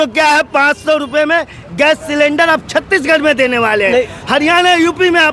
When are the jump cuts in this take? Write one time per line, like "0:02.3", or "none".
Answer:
none